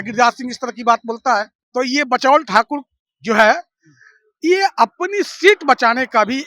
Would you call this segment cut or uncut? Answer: cut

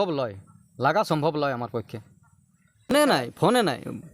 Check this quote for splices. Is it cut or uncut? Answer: cut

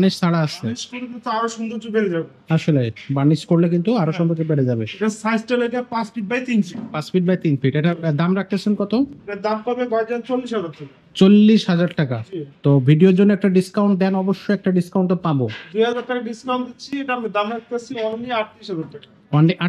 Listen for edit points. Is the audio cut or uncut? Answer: uncut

